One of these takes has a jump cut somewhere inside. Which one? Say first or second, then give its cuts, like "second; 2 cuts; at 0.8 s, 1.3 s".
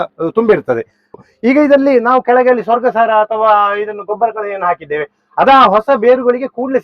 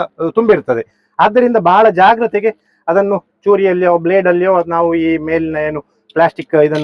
first; 1 cut; at 1.1 s